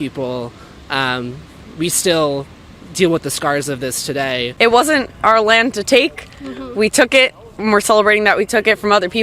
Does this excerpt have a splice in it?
yes; 1 cut; at 4.5 s

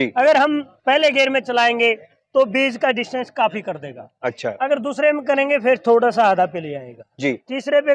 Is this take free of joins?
yes; 0 cuts

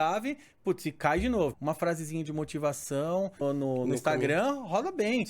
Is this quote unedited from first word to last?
no; 2 cuts; at 1.5 s, 3.4 s

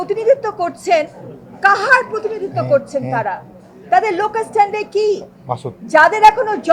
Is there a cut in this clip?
no; 0 cuts

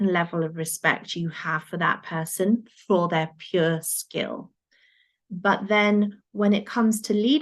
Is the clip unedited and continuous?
yes; 0 cuts

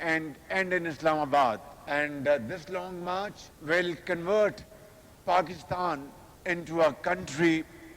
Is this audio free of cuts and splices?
yes; 0 cuts

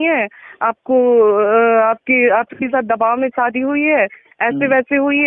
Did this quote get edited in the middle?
no; 0 cuts

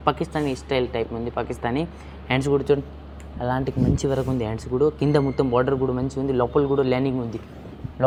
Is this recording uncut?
yes; 0 cuts

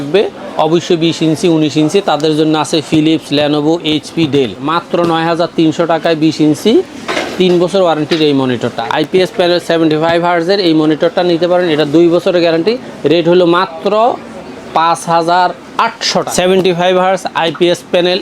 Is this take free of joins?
no; 3 cuts; at 4.8 s, 8.7 s, 16.3 s

